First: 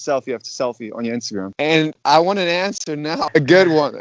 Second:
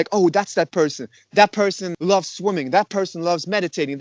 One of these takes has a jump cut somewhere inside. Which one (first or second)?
first